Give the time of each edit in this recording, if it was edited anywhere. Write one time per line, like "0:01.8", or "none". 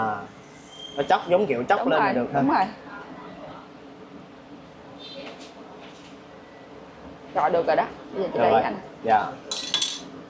none